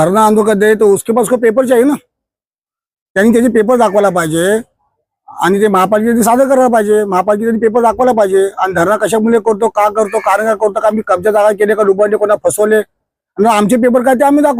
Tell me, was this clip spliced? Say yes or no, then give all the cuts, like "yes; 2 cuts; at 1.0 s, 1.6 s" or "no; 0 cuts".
no; 0 cuts